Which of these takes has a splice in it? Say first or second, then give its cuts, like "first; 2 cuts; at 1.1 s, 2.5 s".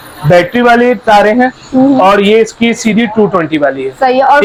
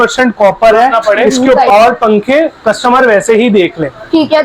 second; 1 cut; at 1.6 s